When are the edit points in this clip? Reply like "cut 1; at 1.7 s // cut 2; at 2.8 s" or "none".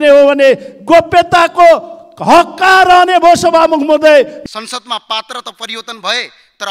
cut 1; at 4.4 s